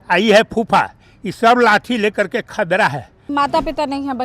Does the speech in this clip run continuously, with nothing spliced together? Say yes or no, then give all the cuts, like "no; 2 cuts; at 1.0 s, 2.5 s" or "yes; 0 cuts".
no; 1 cut; at 3.2 s